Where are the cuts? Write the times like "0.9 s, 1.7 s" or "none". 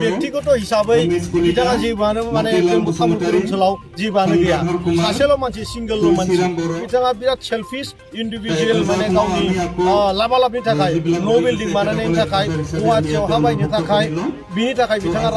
6.8 s

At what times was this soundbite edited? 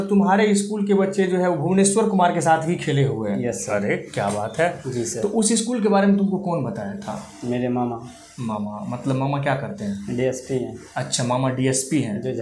4.8 s

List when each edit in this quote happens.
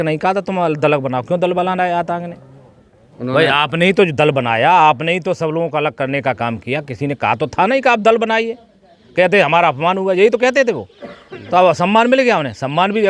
none

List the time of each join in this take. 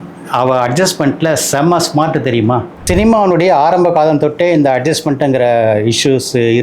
2.7 s

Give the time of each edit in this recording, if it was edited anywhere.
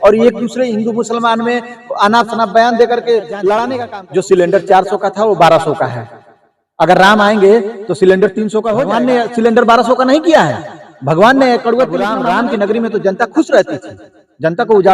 3.7 s, 8.9 s, 12.0 s

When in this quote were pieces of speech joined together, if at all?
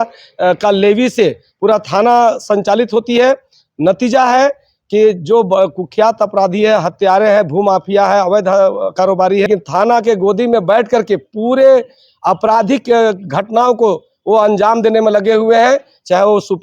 9.5 s

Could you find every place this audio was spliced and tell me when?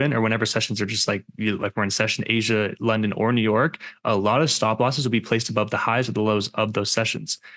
none

